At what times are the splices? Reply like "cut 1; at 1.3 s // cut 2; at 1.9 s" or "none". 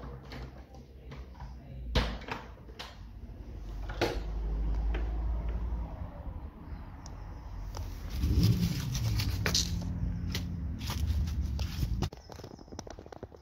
cut 1; at 12.1 s

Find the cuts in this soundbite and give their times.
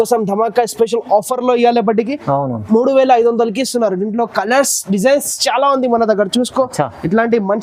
none

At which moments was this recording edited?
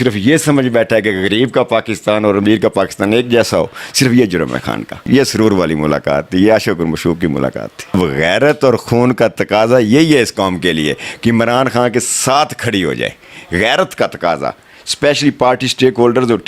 cut 1; at 5.0 s // cut 2; at 7.9 s

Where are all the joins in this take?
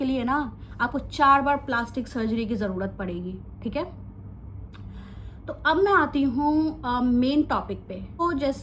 none

